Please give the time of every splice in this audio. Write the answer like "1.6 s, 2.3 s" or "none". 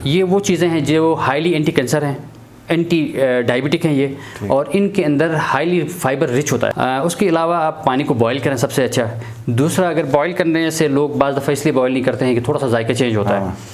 6.7 s